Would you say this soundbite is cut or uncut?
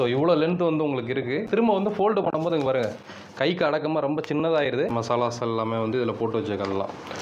cut